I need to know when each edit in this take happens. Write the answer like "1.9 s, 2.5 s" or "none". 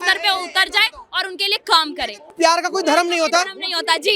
2.3 s

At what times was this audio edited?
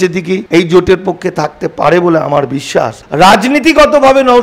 3.0 s

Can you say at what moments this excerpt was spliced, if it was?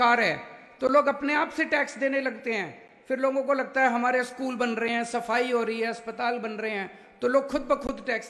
none

